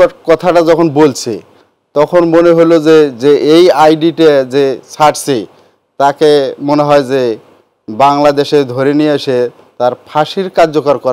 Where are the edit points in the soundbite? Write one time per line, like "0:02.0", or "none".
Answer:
none